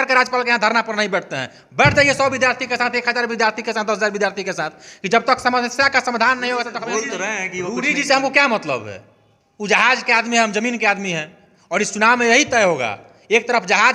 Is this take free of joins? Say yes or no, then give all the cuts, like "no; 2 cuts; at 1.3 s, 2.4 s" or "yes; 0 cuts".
no; 1 cut; at 6.8 s